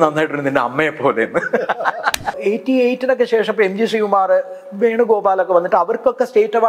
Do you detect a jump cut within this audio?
yes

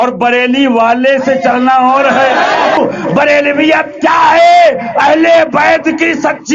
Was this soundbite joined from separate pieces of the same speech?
yes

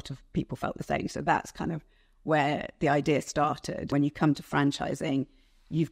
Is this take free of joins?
no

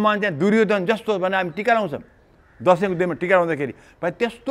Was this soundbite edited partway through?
no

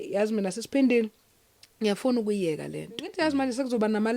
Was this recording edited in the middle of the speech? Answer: yes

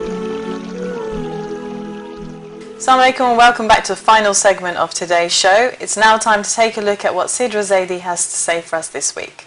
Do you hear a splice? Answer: no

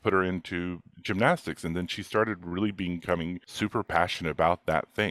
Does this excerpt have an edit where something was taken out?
yes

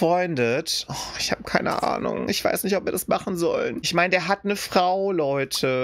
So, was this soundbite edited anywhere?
no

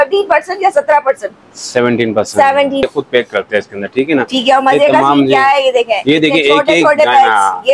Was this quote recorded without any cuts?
no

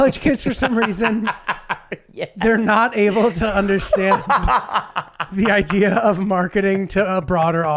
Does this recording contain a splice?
no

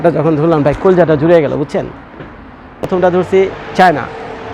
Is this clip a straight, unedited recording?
no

